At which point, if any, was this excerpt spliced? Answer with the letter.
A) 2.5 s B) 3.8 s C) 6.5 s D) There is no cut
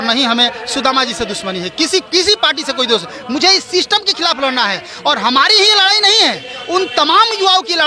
D